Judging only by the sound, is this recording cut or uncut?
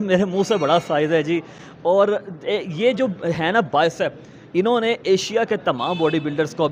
uncut